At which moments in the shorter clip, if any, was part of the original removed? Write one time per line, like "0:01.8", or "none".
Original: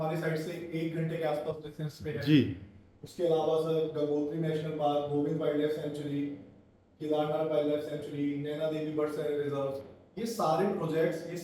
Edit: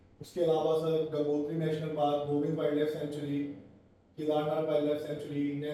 none